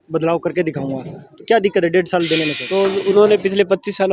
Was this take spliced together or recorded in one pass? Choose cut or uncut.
cut